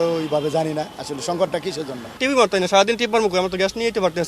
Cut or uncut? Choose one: cut